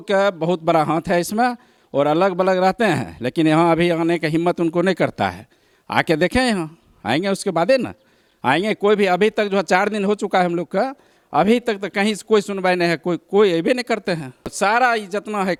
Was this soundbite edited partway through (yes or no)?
no